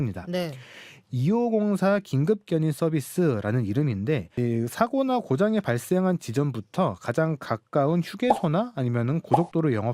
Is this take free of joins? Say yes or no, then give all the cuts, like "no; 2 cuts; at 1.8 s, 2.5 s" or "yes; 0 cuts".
no; 1 cut; at 4.4 s